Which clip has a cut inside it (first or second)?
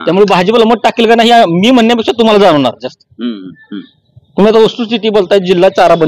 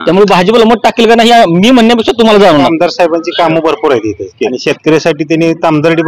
second